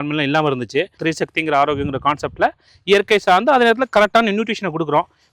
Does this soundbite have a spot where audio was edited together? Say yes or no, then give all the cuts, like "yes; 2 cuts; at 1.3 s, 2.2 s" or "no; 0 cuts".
yes; 1 cut; at 0.9 s